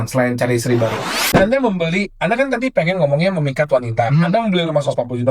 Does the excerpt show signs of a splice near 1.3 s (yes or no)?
yes